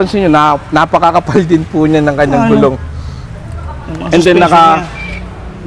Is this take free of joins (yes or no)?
yes